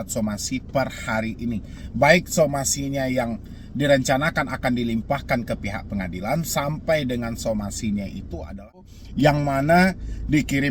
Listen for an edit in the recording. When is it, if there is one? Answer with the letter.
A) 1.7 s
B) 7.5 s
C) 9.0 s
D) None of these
C